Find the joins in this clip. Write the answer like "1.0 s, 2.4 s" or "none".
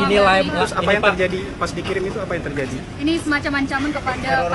none